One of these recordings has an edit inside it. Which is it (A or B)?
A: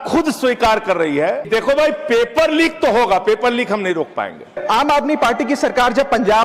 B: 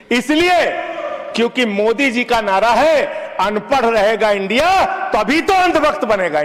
A